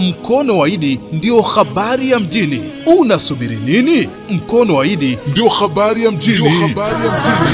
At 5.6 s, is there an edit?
no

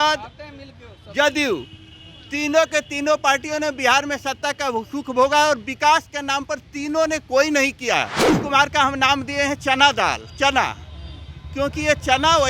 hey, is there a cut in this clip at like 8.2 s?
yes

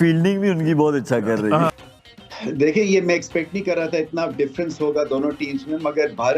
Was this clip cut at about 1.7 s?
yes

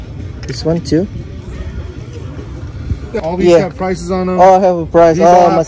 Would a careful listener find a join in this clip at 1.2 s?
no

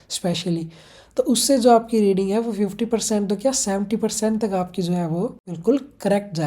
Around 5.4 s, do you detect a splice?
yes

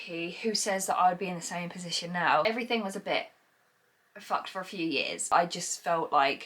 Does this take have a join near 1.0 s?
no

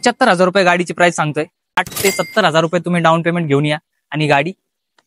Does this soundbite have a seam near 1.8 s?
yes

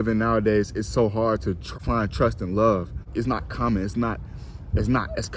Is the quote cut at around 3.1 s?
yes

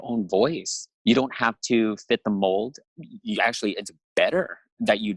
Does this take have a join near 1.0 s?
no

